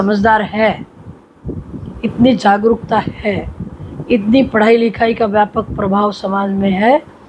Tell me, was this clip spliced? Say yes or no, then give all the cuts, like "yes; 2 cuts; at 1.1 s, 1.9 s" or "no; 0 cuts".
no; 0 cuts